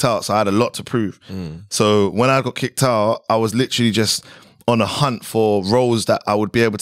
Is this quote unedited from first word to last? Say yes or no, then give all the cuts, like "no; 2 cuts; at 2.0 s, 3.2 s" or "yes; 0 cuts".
yes; 0 cuts